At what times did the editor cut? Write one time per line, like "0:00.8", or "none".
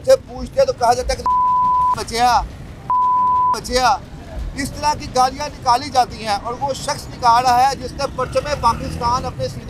none